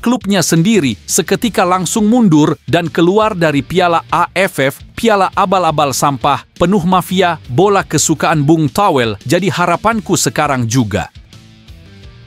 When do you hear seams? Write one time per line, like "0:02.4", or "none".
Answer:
0:11.2